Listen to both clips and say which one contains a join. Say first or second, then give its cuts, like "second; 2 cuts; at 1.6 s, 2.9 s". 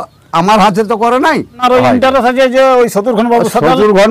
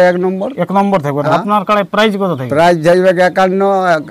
first; 1 cut; at 1.6 s